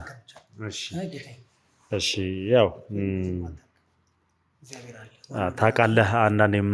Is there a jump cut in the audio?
no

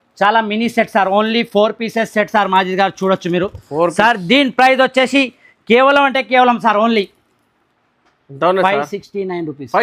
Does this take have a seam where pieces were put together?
no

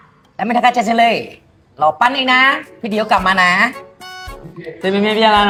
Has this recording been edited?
no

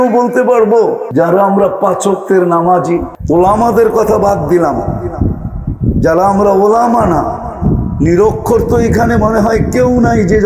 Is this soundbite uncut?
no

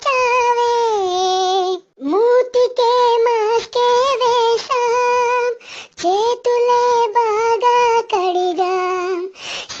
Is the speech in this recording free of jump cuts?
no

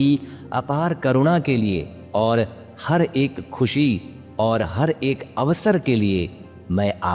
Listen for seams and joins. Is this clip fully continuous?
yes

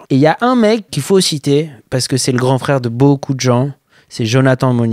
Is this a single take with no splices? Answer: yes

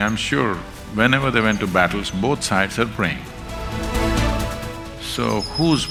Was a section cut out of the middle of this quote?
no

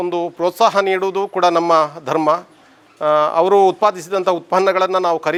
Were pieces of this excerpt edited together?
no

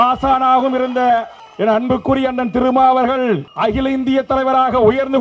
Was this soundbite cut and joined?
yes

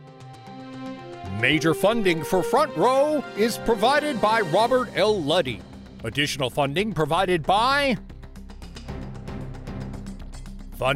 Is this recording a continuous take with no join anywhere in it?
no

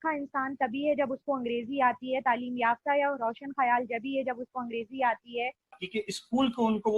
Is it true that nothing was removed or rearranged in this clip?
no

